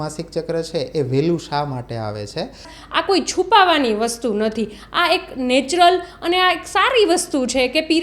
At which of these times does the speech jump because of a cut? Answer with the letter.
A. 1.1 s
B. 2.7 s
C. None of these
B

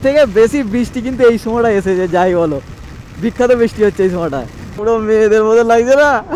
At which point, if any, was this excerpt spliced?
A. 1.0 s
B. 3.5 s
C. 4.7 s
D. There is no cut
C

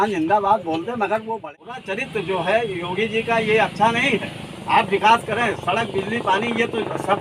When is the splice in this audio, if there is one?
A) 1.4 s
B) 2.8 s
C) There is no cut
A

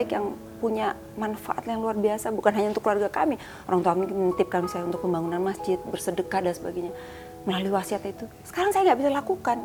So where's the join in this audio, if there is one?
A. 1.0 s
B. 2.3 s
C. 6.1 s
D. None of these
D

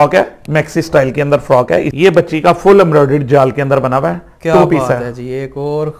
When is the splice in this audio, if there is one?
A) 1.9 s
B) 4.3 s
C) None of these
A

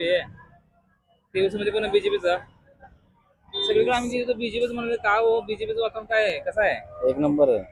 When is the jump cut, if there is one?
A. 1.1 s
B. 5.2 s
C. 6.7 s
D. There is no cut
D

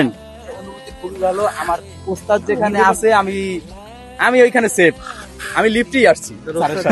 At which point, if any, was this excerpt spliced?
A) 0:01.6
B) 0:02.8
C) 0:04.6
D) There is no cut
D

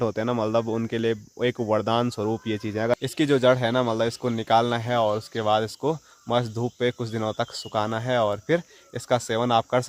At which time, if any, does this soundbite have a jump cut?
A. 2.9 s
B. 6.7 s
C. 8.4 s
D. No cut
D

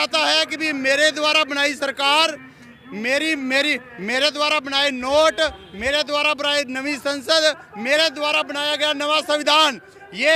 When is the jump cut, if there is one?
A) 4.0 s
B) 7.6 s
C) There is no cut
C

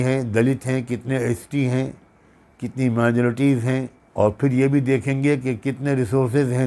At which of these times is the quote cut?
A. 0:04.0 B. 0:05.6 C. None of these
A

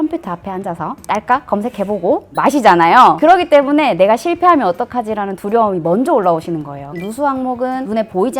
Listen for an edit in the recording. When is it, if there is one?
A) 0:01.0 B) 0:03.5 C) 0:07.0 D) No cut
C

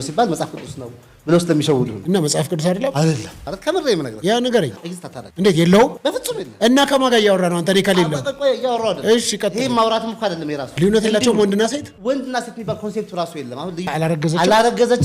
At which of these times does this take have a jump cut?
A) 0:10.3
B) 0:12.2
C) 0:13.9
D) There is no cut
C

